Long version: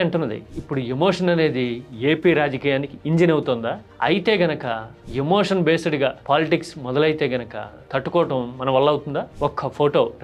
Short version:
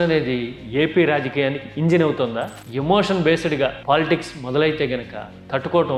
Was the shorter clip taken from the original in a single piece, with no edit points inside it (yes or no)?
no